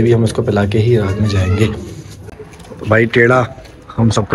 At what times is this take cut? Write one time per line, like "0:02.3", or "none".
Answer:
0:02.2